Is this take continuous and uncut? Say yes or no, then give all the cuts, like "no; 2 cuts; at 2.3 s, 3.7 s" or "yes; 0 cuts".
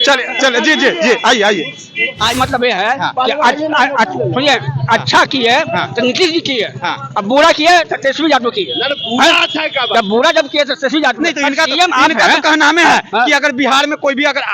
no; 1 cut; at 2.3 s